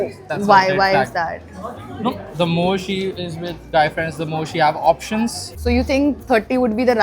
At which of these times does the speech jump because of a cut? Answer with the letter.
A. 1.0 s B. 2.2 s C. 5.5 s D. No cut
C